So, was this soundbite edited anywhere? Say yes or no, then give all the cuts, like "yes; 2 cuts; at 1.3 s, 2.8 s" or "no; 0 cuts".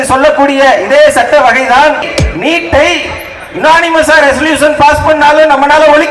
yes; 1 cut; at 2.0 s